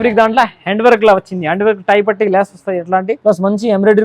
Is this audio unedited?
no; 1 cut; at 3.1 s

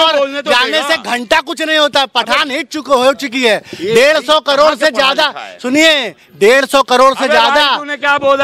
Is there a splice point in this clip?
no; 0 cuts

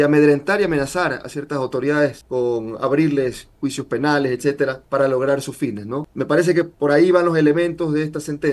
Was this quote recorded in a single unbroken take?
yes; 0 cuts

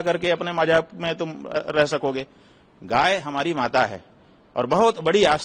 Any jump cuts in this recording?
no; 0 cuts

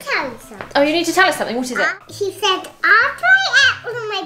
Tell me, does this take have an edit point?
yes; 1 cut; at 2.0 s

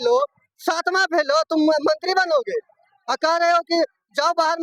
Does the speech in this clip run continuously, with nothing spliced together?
yes; 0 cuts

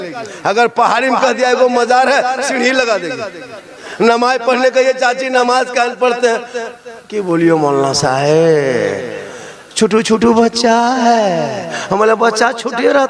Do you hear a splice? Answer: no; 0 cuts

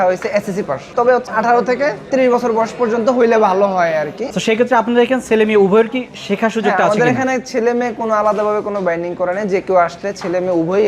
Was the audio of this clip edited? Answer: yes; 2 cuts; at 1.1 s, 4.2 s

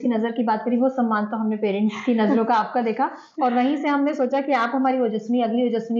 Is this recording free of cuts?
yes; 0 cuts

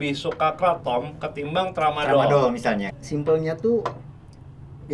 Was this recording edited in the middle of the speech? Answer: yes; 1 cut; at 2.9 s

